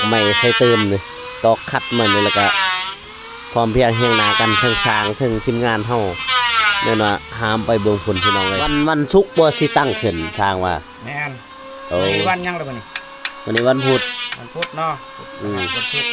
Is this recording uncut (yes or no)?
no